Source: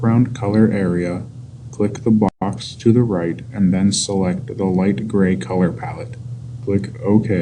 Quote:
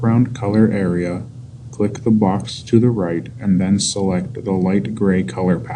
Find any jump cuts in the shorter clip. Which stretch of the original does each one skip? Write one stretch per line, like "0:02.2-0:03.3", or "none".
0:02.3-0:02.4

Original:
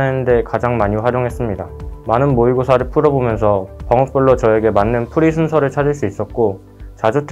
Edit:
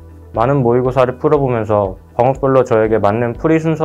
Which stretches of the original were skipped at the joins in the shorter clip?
none

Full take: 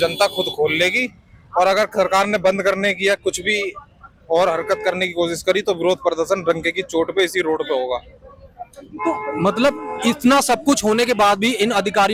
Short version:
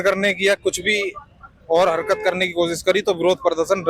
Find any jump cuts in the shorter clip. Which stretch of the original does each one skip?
none

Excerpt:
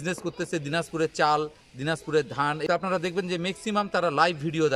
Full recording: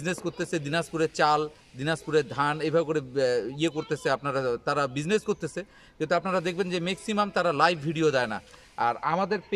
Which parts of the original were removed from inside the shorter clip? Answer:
0:02.7-0:06.1

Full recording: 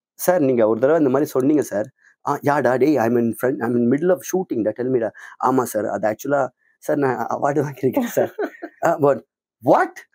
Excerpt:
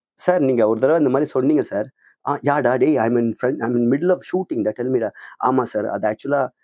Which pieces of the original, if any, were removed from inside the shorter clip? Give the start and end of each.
none

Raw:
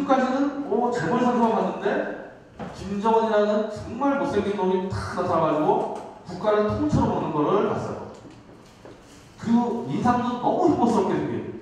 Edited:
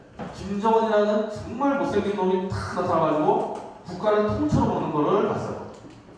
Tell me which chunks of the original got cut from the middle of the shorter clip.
none

